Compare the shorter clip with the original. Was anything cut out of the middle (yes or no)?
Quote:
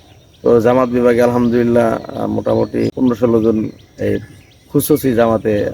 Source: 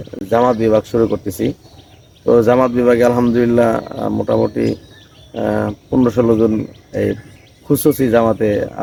yes